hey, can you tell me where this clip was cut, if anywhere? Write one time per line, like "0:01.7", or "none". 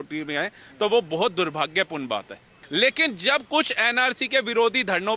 0:02.6

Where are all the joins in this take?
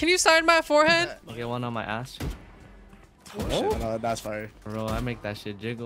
none

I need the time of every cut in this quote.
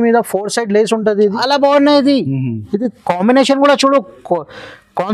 0:01.4

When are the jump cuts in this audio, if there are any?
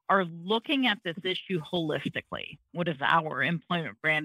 0:02.6

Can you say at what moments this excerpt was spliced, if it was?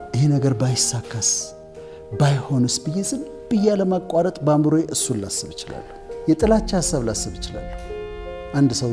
0:06.2

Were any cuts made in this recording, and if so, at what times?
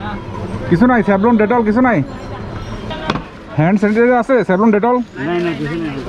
0:02.9

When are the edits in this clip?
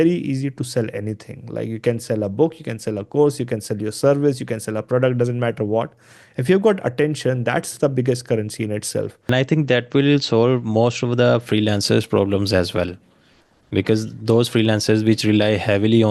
0:09.3

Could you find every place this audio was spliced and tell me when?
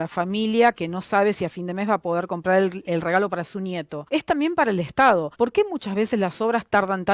0:03.9
0:05.3

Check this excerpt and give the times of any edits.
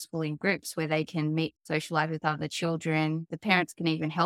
0:01.6

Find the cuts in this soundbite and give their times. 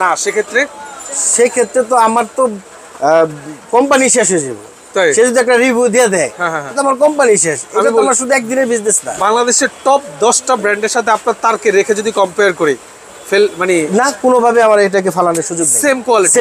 none

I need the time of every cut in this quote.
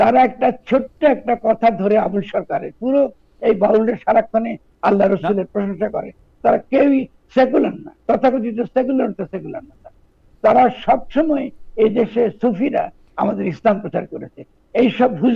none

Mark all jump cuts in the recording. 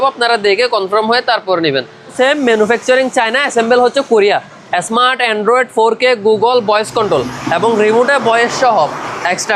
0:02.1

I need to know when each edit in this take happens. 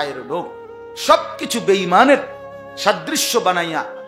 none

